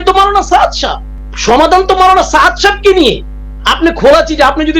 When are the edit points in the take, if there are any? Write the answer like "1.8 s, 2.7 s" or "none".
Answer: none